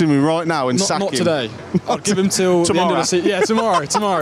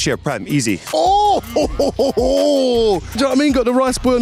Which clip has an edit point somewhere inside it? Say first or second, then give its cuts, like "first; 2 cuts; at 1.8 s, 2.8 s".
second; 2 cuts; at 0.8 s, 3.1 s